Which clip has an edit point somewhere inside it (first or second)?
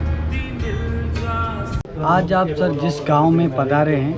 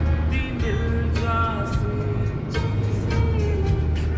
first